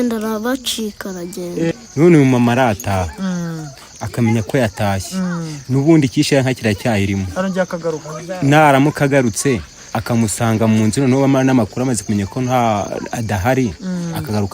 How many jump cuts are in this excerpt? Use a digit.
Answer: 1